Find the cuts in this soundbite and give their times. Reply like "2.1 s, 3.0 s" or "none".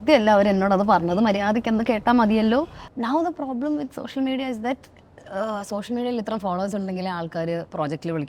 2.8 s